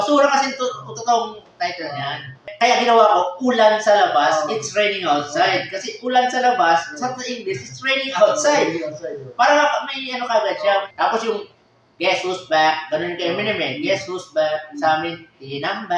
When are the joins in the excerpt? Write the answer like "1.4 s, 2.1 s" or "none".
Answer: 2.5 s